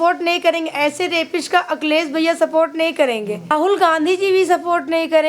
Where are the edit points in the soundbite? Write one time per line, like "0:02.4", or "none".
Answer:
0:03.5

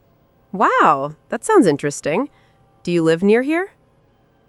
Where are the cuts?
none

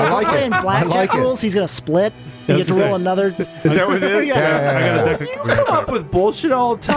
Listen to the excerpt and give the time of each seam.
0:05.4

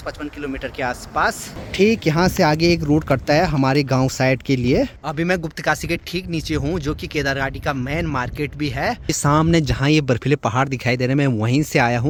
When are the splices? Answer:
none

